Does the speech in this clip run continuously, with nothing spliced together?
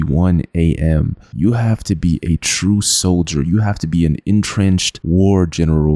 yes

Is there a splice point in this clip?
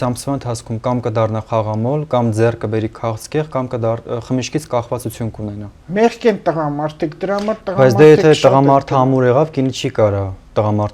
yes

